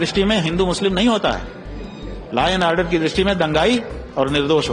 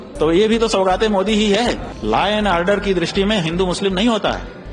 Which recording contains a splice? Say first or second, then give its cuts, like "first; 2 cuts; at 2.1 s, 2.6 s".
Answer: second; 1 cut; at 1.9 s